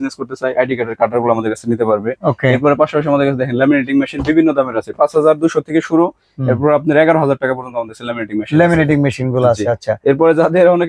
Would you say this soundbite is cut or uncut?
uncut